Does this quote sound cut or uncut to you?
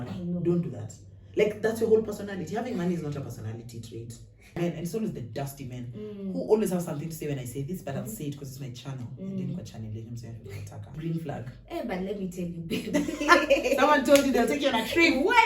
cut